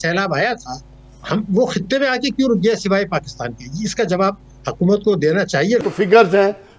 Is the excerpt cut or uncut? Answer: cut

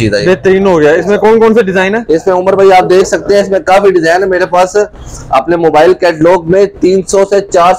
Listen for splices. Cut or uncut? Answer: uncut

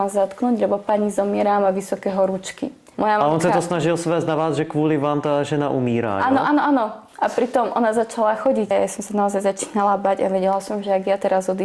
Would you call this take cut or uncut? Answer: cut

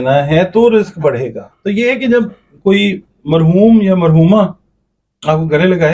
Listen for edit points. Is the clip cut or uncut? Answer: cut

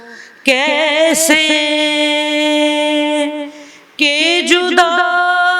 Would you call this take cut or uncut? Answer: uncut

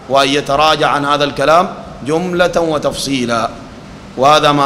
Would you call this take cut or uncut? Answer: uncut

